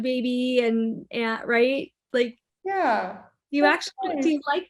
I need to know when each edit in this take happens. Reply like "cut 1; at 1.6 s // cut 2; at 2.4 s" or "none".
none